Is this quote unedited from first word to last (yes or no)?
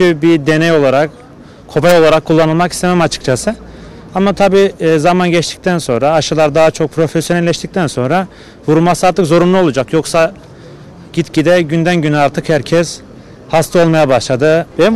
yes